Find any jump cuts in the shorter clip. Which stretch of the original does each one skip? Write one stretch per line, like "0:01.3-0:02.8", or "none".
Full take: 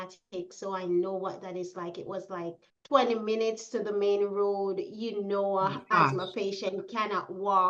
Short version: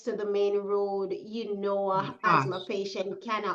none